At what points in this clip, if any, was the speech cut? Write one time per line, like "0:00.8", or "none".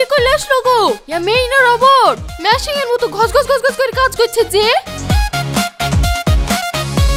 none

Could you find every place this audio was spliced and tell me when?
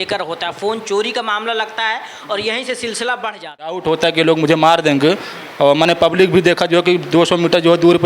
0:03.8

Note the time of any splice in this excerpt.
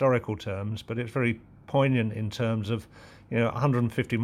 none

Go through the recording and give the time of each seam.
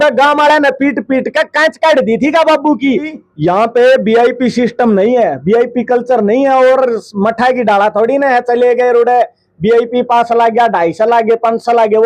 0:03.2

